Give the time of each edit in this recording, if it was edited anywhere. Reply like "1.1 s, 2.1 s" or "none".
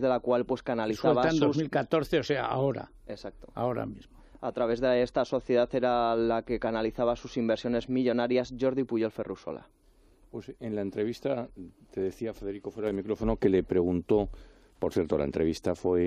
13.5 s

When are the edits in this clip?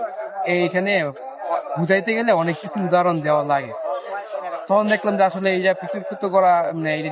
none

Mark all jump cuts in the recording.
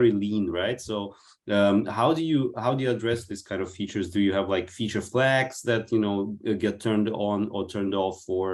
none

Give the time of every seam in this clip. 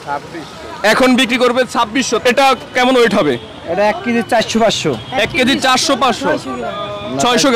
2.1 s

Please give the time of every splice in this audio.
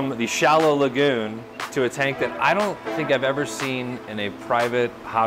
none

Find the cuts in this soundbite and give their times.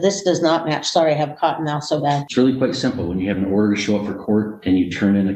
2.2 s

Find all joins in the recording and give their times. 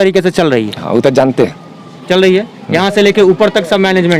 none

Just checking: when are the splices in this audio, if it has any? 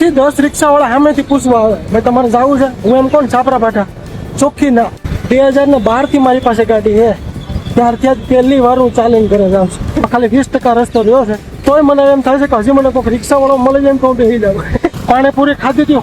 5.1 s, 10.1 s, 11.6 s, 14.9 s

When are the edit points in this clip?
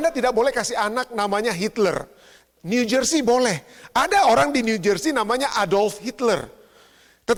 none

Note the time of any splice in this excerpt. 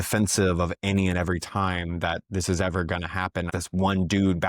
3.5 s

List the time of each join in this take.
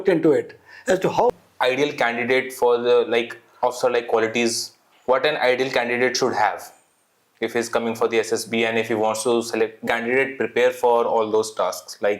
1.3 s, 9.8 s

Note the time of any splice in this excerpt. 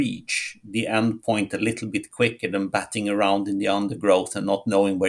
none

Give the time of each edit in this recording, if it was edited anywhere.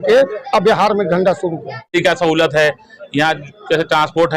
1.9 s

